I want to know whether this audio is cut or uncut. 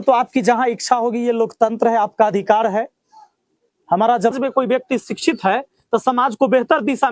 cut